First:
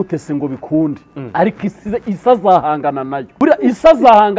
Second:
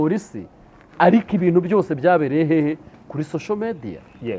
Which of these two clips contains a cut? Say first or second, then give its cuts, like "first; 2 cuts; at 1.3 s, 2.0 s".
first; 1 cut; at 3.4 s